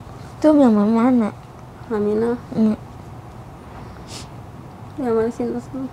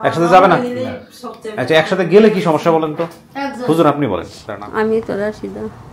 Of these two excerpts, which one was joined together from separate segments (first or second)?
second